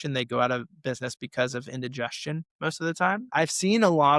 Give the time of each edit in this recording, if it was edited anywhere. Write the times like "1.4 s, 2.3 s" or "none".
3.2 s